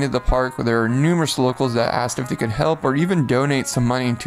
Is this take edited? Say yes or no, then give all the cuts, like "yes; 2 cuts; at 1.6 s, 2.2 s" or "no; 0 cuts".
no; 0 cuts